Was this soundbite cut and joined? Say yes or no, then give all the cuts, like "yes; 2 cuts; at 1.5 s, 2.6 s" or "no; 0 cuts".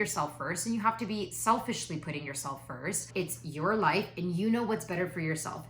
yes; 1 cut; at 3.1 s